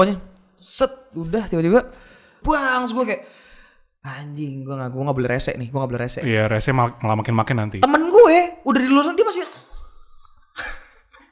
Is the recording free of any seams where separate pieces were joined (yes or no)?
no